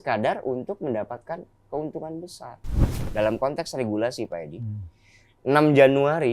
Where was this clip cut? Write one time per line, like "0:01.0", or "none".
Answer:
0:03.0